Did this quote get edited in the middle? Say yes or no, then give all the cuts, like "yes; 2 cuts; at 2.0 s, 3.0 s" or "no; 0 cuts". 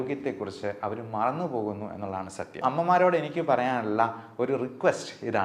yes; 1 cut; at 2.6 s